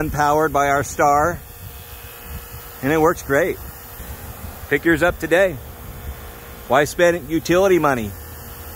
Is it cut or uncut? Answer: uncut